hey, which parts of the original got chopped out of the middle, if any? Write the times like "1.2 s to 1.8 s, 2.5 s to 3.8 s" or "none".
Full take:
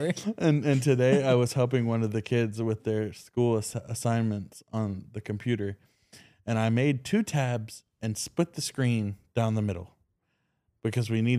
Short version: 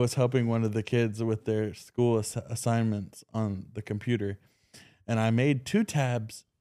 none